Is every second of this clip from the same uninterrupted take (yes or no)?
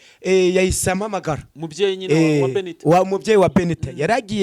yes